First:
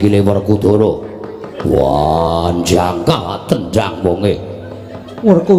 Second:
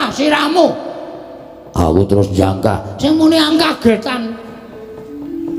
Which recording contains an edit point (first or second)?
second